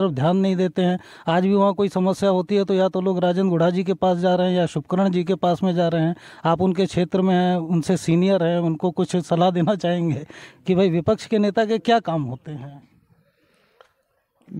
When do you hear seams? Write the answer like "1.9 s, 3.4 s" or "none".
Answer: none